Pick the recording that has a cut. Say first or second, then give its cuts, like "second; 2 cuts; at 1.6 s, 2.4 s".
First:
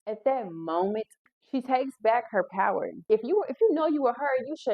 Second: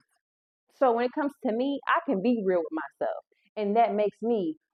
first; 2 cuts; at 1.2 s, 3.0 s